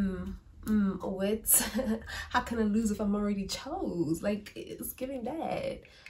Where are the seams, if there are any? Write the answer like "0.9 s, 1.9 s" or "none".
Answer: none